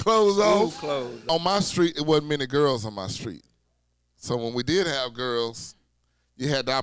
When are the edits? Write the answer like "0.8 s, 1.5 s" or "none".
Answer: 1.1 s